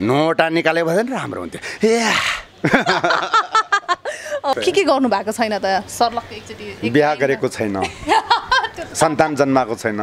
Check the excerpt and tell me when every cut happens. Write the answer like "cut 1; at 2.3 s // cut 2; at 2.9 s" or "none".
cut 1; at 4.5 s